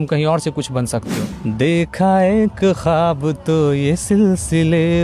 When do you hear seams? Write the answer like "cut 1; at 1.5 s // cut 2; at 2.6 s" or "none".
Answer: cut 1; at 1.2 s